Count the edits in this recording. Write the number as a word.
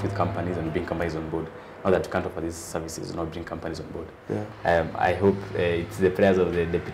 one